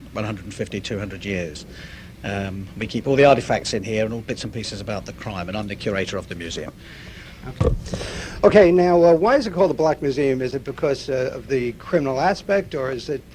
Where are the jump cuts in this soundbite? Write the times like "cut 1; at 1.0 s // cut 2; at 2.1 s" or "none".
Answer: cut 1; at 1.5 s